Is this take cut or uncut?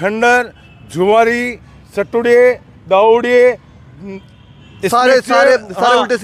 uncut